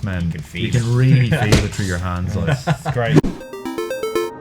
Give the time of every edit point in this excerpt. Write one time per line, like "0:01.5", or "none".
0:03.3